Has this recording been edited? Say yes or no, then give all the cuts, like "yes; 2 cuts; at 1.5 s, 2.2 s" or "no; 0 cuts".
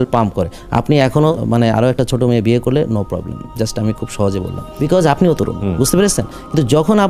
yes; 2 cuts; at 1.4 s, 5.6 s